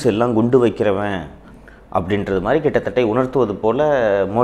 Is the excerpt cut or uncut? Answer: uncut